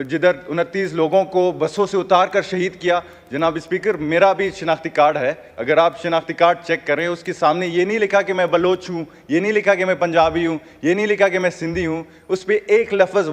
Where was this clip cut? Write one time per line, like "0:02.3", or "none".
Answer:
none

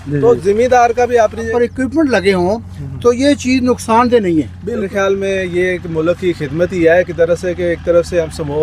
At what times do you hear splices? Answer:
0:01.5
0:04.9

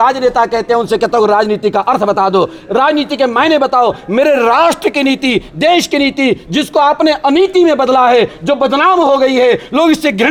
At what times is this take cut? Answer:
none

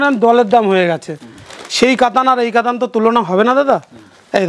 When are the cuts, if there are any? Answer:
none

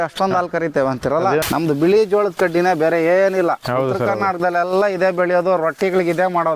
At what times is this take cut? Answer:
0:01.4

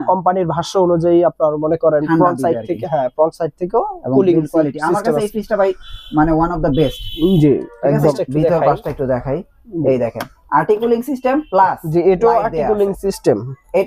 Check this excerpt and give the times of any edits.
0:08.2

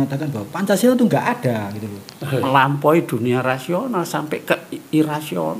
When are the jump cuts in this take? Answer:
0:02.5

